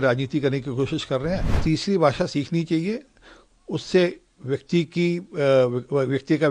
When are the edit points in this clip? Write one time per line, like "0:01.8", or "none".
0:01.5